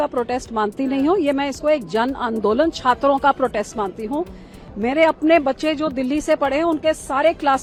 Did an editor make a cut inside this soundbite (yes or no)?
no